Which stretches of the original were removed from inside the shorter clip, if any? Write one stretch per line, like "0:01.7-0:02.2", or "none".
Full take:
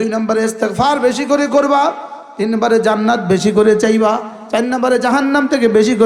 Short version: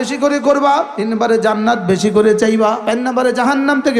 0:02.0-0:02.4
0:04.2-0:04.5